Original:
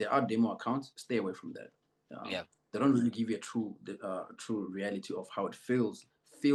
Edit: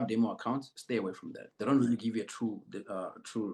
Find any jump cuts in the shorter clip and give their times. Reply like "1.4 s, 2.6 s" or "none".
1.4 s